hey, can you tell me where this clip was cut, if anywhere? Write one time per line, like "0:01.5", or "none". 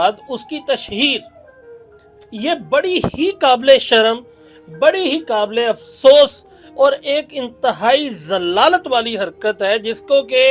none